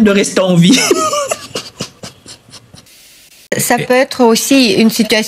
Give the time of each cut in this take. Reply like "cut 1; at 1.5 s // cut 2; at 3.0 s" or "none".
cut 1; at 3.5 s